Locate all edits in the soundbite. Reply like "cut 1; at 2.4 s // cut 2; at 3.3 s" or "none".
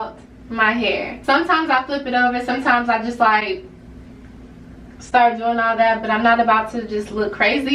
cut 1; at 1.1 s